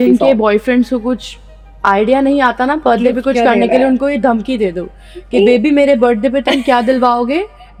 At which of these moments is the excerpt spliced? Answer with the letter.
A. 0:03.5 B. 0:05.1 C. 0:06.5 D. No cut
D